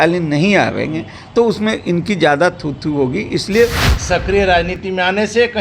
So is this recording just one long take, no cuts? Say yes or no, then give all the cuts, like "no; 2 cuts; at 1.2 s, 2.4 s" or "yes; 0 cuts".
no; 1 cut; at 3.9 s